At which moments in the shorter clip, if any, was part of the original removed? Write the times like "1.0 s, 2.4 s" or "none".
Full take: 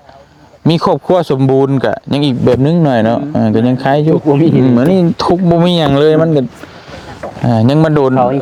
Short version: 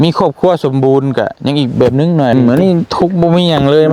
2.3 s